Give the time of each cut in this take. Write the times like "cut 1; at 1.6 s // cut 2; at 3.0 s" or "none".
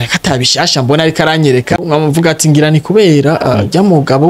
cut 1; at 1.8 s